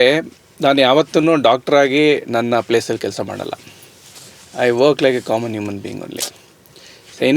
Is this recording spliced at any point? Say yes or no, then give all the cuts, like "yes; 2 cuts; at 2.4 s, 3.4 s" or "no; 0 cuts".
no; 0 cuts